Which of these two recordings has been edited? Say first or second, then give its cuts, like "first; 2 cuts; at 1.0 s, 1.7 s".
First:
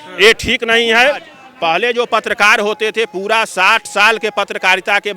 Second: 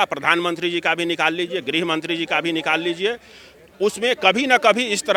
first; 1 cut; at 1.4 s